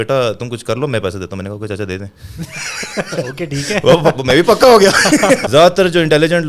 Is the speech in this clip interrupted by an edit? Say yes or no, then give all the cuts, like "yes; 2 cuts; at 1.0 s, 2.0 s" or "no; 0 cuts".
yes; 1 cut; at 5.4 s